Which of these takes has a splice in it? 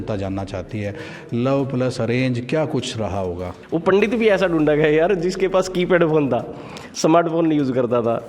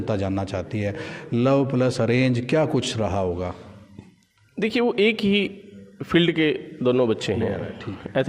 first; 1 cut; at 3.5 s

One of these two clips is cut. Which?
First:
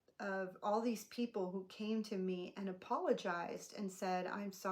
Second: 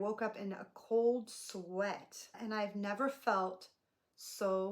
second; 1 cut; at 2.3 s

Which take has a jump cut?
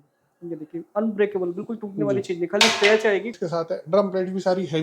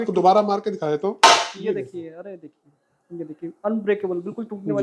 first; 1 cut; at 3.3 s

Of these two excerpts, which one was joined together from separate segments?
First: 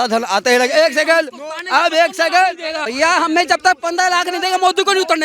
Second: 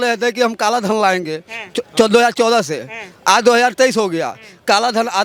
first; 1 cut; at 2.8 s

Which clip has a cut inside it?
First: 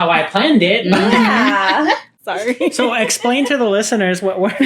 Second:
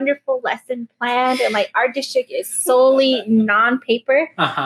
first; 1 cut; at 2.1 s

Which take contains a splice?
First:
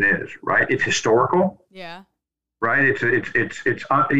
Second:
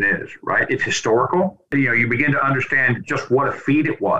second; 1 cut; at 1.7 s

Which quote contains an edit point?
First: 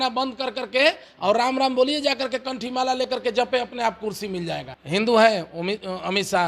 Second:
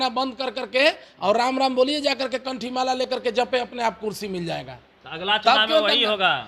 first; 1 cut; at 4.7 s

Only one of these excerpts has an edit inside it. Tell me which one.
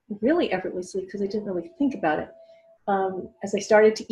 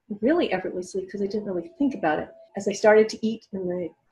second; 1 cut; at 2.4 s

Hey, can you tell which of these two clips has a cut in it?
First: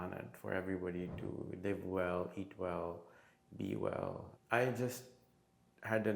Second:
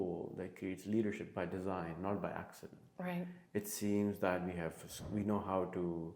first; 1 cut; at 4.3 s

